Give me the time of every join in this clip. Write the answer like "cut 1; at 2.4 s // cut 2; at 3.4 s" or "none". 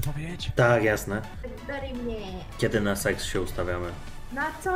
cut 1; at 1.5 s